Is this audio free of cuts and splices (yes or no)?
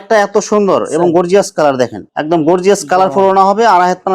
no